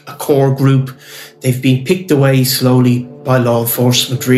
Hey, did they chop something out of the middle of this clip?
yes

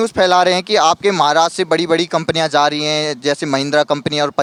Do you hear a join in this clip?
no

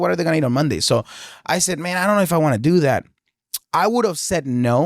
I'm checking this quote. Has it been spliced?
yes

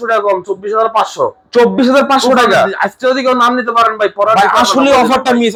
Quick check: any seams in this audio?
no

